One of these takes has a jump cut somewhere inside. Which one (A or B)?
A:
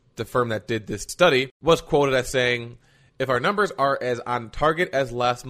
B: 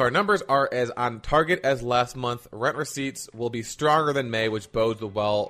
A